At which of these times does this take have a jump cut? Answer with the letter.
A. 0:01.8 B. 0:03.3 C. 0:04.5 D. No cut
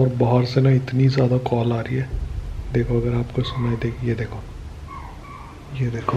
C